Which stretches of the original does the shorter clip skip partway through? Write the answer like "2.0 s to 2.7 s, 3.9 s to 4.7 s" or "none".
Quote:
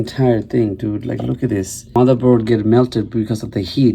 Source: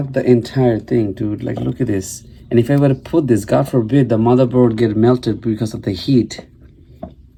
2.3 s to 4.2 s